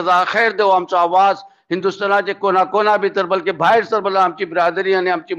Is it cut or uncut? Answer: uncut